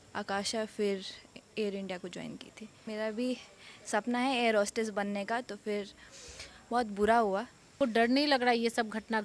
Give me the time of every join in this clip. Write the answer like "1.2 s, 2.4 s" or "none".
2.8 s, 7.7 s